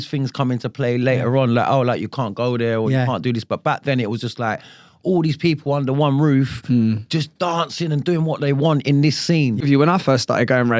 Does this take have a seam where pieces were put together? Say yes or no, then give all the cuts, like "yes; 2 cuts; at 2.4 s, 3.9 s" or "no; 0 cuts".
yes; 1 cut; at 9.6 s